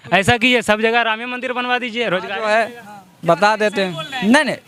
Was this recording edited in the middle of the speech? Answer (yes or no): no